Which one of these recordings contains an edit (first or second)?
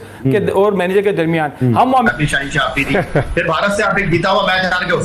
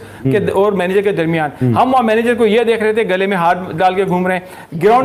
first